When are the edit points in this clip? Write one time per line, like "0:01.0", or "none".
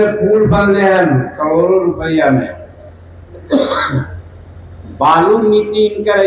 none